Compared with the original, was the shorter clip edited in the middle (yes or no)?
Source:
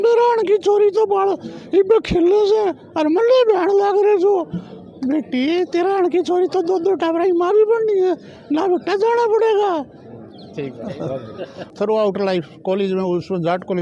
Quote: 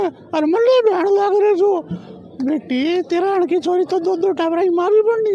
no